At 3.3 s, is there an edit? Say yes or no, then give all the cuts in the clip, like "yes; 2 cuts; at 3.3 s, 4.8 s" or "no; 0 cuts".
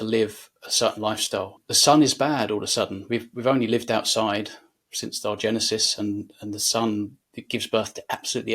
no; 1 cut; at 1.6 s